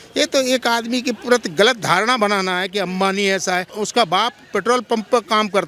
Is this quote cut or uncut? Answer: cut